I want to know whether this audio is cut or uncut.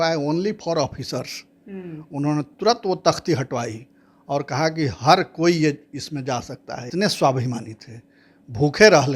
cut